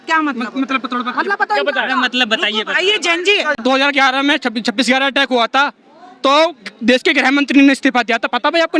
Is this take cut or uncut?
cut